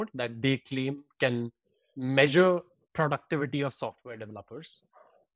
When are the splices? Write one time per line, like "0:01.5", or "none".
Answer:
none